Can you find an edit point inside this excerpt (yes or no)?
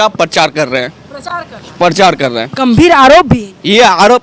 no